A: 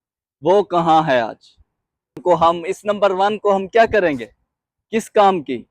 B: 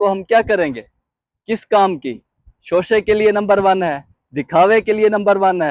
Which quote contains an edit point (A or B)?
A